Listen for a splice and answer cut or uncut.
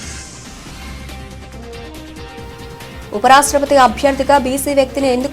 cut